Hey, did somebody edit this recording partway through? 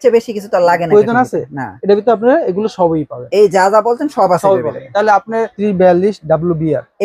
yes; 1 cut; at 5.5 s

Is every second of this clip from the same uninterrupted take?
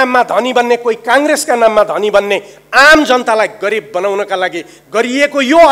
yes; 0 cuts

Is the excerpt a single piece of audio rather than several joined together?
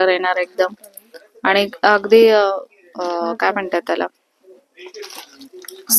yes; 0 cuts

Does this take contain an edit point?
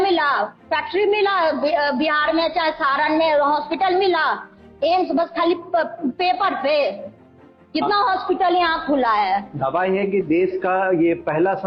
no; 0 cuts

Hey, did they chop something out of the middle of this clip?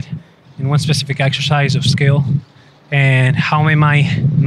no; 0 cuts

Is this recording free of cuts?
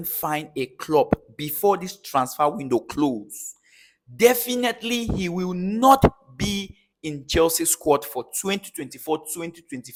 yes; 0 cuts

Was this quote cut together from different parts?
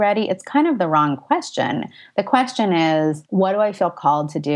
yes; 1 cut; at 3.2 s

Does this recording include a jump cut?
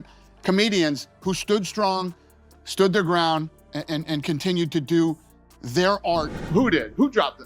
yes; 1 cut; at 6.4 s

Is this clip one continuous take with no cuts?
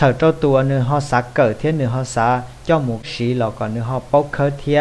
no; 1 cut; at 3.1 s

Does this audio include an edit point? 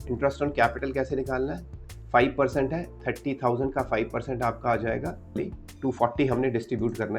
yes; 1 cut; at 5.4 s

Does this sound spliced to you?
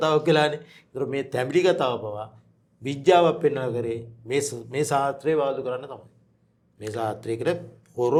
no; 0 cuts

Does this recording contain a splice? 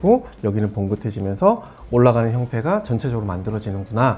no; 0 cuts

